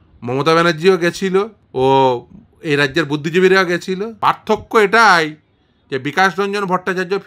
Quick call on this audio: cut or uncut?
cut